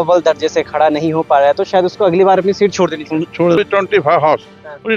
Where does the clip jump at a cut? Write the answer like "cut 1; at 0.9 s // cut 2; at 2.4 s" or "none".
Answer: cut 1; at 3.6 s